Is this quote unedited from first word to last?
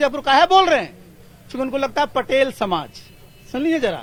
yes; 0 cuts

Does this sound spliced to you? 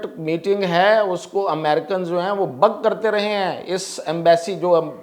no; 0 cuts

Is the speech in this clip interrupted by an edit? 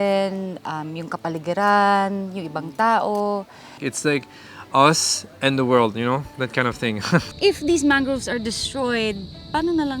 yes; 2 cuts; at 3.8 s, 7.3 s

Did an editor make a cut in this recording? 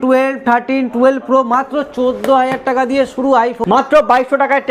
yes; 1 cut; at 3.6 s

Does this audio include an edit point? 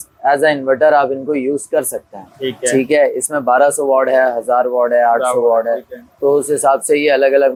no; 0 cuts

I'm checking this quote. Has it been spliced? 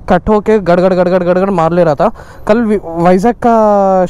no; 0 cuts

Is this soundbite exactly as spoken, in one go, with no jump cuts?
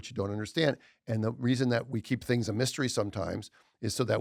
yes; 0 cuts

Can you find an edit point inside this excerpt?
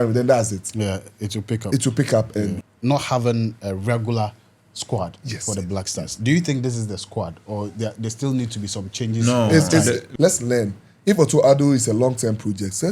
yes; 2 cuts; at 2.6 s, 10.1 s

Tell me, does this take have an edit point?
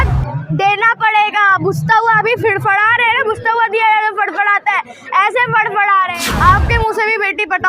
yes; 1 cut; at 6.2 s

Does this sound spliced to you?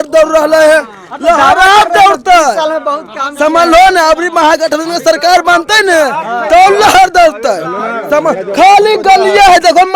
no; 0 cuts

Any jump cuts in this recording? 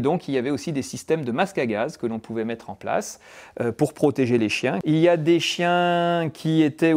yes; 1 cut; at 4.8 s

